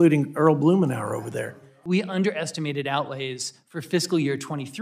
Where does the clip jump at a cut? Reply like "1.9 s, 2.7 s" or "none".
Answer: 1.7 s